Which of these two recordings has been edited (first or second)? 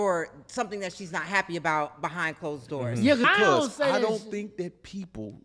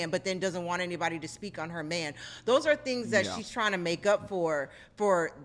first